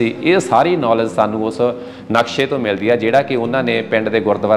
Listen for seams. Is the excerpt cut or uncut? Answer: uncut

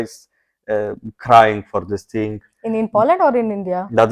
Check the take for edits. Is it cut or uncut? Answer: uncut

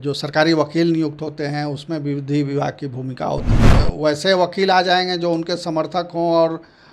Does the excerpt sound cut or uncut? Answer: cut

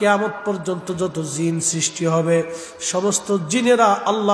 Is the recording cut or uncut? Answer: uncut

